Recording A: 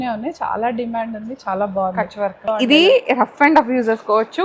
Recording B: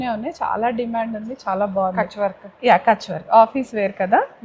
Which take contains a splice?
A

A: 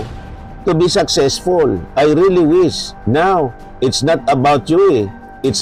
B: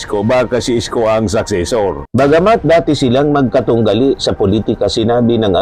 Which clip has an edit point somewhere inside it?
B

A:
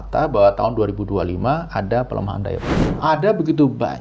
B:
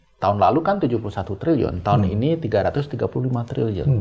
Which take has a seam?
A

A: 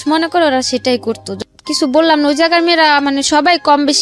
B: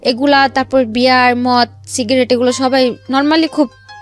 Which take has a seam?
A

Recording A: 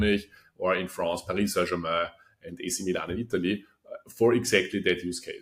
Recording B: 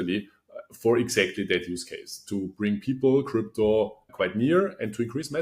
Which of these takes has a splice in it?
B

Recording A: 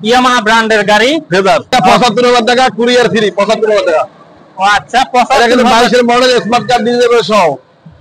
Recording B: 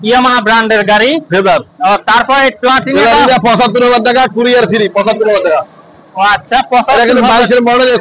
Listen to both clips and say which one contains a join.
A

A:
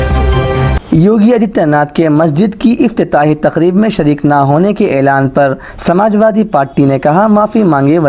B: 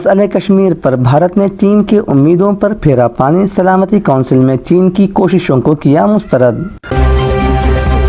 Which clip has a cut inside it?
B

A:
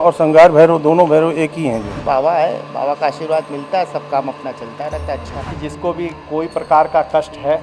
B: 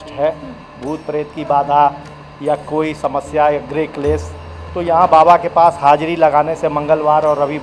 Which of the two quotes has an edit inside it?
A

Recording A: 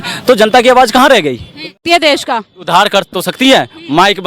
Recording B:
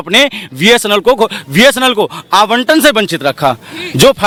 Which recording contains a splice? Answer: A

